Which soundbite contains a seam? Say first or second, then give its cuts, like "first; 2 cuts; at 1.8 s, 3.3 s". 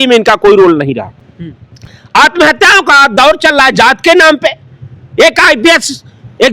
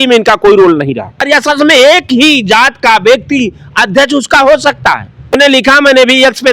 second; 2 cuts; at 1.2 s, 5.3 s